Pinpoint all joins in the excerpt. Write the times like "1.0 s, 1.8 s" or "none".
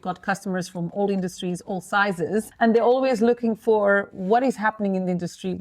2.5 s